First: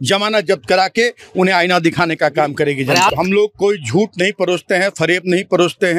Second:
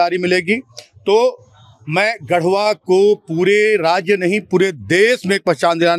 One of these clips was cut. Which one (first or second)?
first